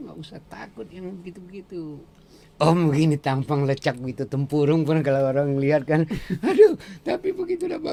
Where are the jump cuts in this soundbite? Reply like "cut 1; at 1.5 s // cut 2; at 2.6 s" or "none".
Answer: none